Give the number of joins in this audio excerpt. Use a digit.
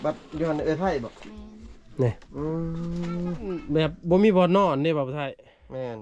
1